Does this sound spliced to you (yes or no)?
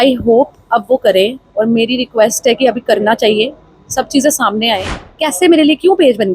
yes